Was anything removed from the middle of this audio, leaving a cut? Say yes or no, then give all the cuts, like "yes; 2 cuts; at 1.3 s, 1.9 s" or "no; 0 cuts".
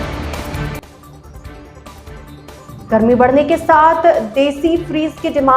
no; 0 cuts